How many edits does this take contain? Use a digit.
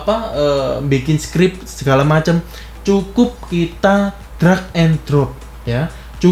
0